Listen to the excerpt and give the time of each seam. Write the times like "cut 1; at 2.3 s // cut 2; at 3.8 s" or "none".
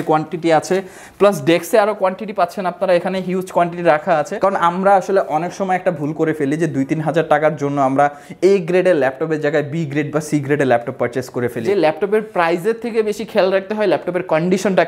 cut 1; at 4.3 s // cut 2; at 11.6 s